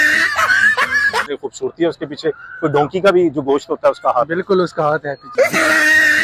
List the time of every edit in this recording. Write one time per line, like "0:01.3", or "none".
0:01.3
0:05.2

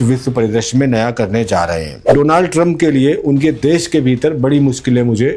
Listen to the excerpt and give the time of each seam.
0:02.0

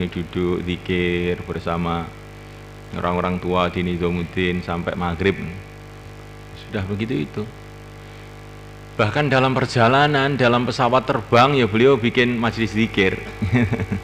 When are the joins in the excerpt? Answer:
none

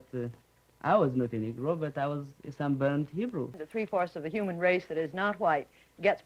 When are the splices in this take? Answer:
0:03.6

